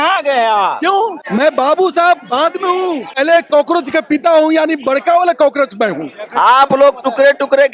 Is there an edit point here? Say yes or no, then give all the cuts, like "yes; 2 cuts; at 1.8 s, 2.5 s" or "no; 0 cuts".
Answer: yes; 3 cuts; at 1.2 s, 3.2 s, 6.2 s